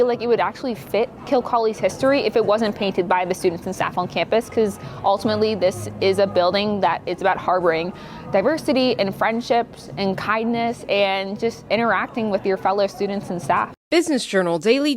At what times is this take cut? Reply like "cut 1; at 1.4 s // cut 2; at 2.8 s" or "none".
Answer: cut 1; at 13.8 s